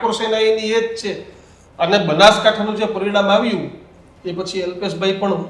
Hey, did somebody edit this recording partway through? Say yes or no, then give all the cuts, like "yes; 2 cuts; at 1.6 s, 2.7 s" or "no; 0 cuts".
no; 0 cuts